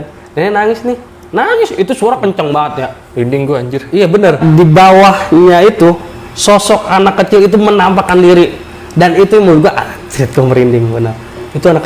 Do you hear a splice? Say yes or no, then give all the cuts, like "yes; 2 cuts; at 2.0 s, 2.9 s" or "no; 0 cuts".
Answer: yes; 1 cut; at 4.4 s